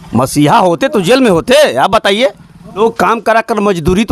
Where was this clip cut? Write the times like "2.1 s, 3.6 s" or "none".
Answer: 2.8 s